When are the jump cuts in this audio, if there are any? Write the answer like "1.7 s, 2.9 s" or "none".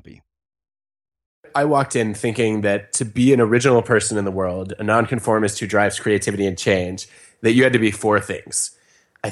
1.5 s